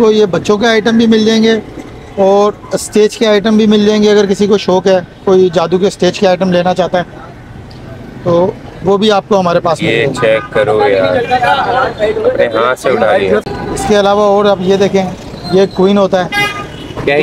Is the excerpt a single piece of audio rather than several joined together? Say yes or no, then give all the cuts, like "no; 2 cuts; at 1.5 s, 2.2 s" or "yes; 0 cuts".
yes; 0 cuts